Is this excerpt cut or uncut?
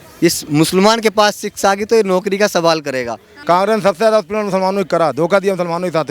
cut